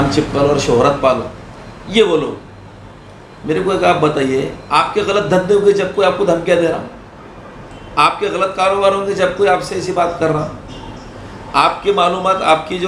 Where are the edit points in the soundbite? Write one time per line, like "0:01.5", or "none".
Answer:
none